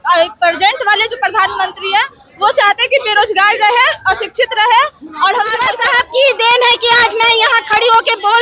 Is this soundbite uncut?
no; 1 cut; at 5.6 s

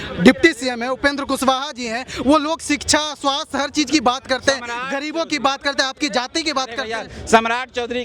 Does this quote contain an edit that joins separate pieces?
no; 0 cuts

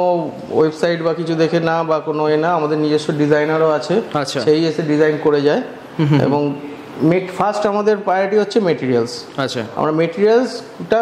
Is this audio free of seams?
yes; 0 cuts

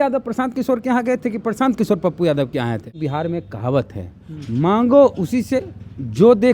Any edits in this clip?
yes; 1 cut; at 2.9 s

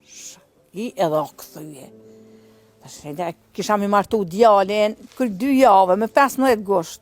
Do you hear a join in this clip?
no; 0 cuts

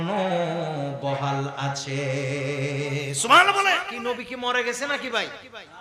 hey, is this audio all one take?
no; 1 cut; at 3.9 s

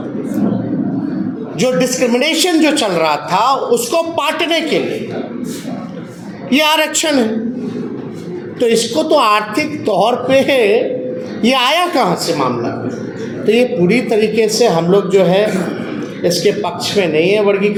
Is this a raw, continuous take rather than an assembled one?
yes; 0 cuts

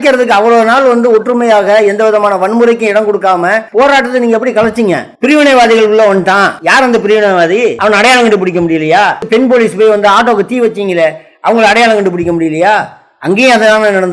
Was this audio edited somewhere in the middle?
yes; 5 cuts; at 3.6 s, 5.1 s, 6.6 s, 7.8 s, 9.2 s

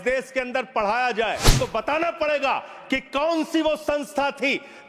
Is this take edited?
yes; 1 cut; at 1.5 s

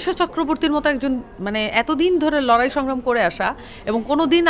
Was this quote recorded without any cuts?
yes; 0 cuts

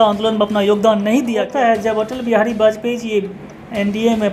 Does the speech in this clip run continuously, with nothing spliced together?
no; 1 cut; at 1.5 s

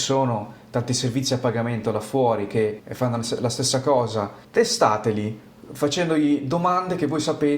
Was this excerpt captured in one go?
no; 2 cuts; at 2.8 s, 4.4 s

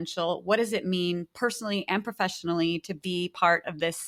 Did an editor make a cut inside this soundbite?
no; 0 cuts

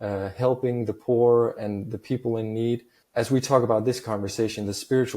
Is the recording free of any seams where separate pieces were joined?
no; 1 cut; at 3.0 s

